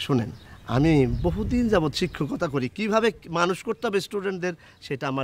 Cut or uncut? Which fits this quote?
uncut